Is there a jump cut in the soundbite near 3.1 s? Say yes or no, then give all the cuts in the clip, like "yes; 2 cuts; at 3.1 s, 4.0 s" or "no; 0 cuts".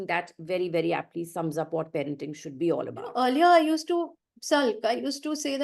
yes; 1 cut; at 3.1 s